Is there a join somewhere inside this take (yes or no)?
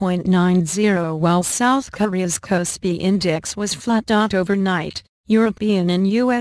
yes